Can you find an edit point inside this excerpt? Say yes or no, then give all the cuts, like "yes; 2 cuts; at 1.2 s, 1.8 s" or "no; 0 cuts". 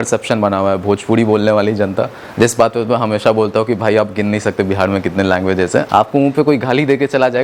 yes; 1 cut; at 5.9 s